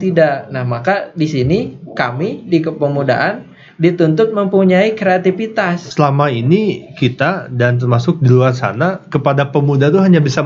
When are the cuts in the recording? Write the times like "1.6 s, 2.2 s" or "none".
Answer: 5.9 s

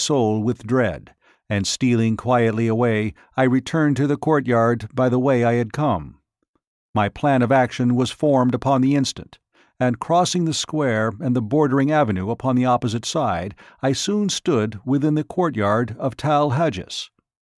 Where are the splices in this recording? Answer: none

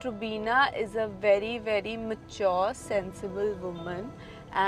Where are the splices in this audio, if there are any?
none

